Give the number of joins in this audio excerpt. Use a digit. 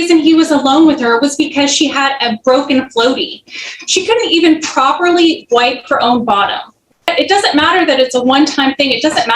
1